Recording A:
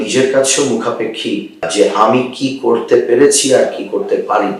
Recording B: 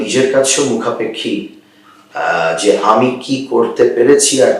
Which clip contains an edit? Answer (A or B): A